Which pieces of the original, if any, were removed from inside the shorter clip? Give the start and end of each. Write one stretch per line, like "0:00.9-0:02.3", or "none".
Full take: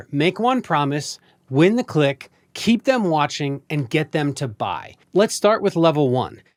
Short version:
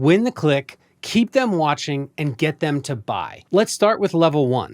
0:04.9-0:05.0